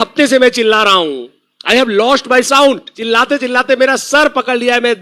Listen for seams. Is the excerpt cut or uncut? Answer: cut